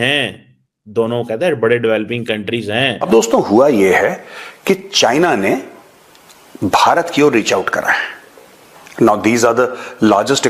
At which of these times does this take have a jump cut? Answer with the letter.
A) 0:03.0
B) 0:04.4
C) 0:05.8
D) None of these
A